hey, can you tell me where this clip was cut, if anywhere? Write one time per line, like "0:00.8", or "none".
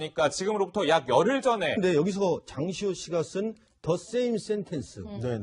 none